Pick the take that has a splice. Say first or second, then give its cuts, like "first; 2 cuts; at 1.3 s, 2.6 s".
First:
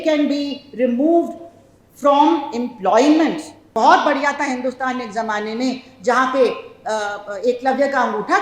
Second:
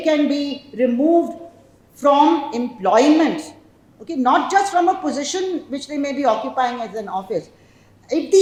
first; 1 cut; at 3.6 s